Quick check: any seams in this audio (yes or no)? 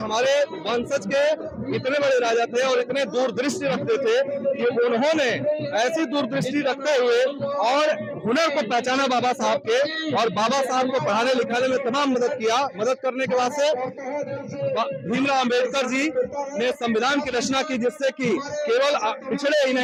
no